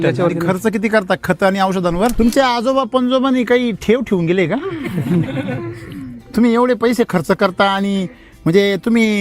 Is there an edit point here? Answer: yes; 1 cut; at 2.1 s

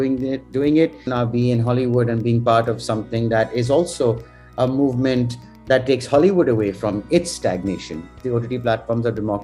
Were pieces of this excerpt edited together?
yes; 2 cuts; at 1.0 s, 8.1 s

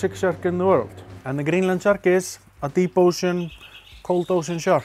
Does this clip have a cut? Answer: no; 0 cuts

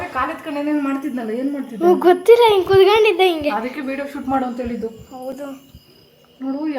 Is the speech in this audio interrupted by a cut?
no; 0 cuts

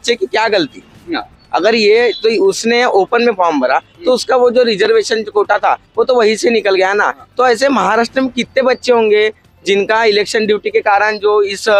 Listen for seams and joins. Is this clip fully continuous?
yes; 0 cuts

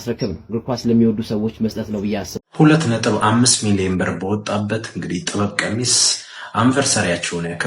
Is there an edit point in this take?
yes; 1 cut; at 2.3 s

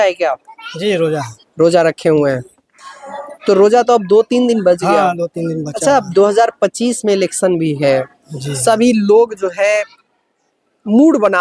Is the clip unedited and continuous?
yes; 0 cuts

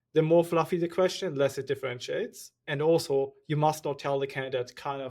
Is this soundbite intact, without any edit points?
no; 1 cut; at 2.6 s

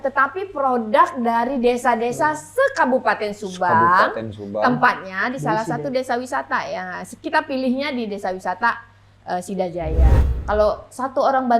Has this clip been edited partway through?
yes; 1 cut; at 10.2 s

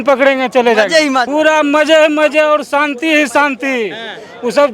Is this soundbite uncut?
no; 1 cut; at 1.3 s

